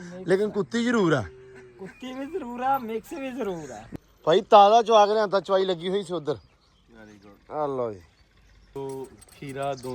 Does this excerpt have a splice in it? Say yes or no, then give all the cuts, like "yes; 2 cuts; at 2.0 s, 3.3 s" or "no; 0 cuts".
yes; 2 cuts; at 3.7 s, 8.8 s